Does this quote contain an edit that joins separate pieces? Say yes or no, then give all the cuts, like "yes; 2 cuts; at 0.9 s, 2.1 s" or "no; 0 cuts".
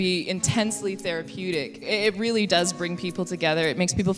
yes; 1 cut; at 1.8 s